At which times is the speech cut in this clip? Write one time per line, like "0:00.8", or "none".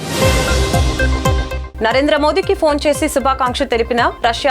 0:01.6